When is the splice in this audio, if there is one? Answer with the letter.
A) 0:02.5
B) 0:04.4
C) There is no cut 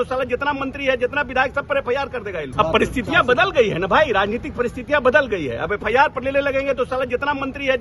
A